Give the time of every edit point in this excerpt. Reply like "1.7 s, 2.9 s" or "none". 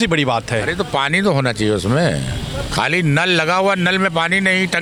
none